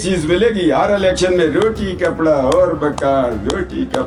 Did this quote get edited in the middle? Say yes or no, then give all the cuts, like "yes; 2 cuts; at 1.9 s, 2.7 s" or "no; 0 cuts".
no; 0 cuts